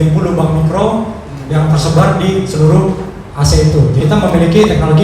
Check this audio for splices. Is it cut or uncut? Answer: cut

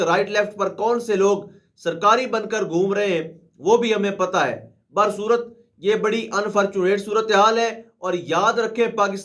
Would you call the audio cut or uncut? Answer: uncut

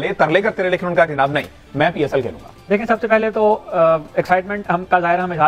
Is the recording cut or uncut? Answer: uncut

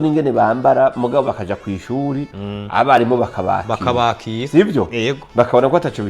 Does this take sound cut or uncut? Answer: uncut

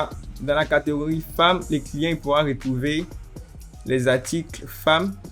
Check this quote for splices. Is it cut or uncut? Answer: uncut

